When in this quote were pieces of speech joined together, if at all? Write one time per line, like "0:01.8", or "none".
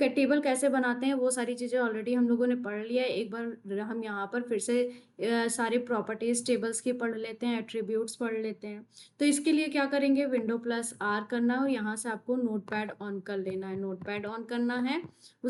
none

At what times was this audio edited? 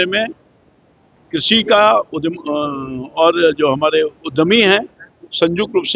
none

